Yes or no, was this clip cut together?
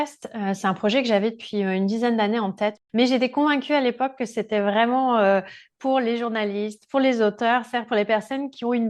yes